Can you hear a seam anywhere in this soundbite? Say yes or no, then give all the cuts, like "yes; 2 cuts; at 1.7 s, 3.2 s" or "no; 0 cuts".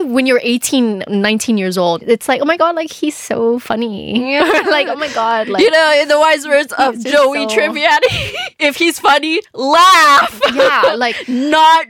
yes; 2 cuts; at 2.0 s, 8.5 s